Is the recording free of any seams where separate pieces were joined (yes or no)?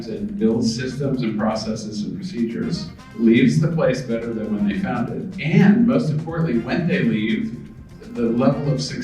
no